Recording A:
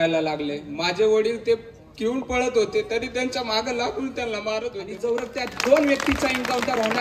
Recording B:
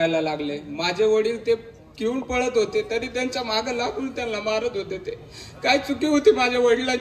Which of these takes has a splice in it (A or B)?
A